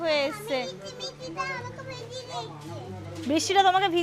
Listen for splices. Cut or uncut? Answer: uncut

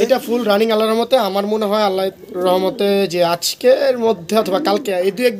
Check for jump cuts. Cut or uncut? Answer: uncut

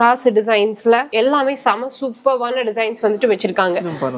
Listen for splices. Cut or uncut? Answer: uncut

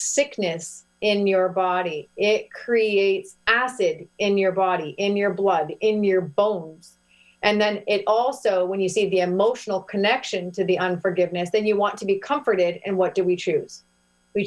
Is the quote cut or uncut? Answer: uncut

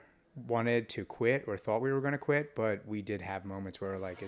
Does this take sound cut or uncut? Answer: uncut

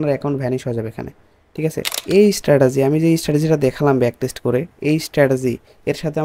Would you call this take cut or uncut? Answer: cut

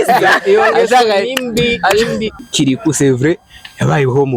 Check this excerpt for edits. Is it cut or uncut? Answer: cut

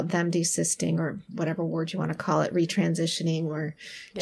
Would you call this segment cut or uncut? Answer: uncut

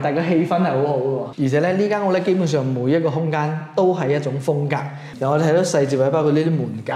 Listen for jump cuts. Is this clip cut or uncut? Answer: cut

